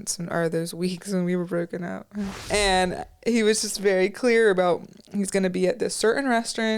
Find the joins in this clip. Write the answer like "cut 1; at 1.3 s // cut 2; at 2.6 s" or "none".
cut 1; at 2.4 s